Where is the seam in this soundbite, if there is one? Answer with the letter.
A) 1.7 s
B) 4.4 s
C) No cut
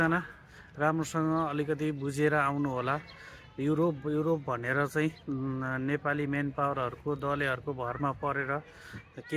C